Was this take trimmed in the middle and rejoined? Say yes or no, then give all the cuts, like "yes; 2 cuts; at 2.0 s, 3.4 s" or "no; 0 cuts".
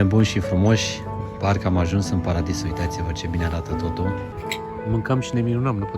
yes; 1 cut; at 4.3 s